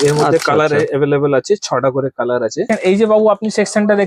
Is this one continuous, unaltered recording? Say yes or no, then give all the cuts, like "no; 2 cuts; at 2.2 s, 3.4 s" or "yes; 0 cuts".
no; 1 cut; at 2.6 s